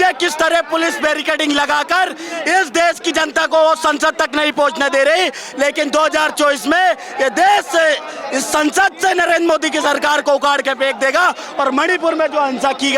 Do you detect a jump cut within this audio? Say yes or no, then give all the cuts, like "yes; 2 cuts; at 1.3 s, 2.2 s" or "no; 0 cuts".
no; 0 cuts